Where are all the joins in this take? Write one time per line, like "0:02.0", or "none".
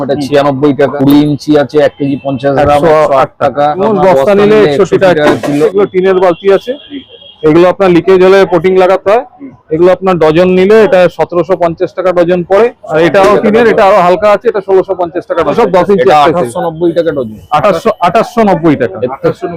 0:00.9
0:03.8
0:05.7
0:12.8
0:15.5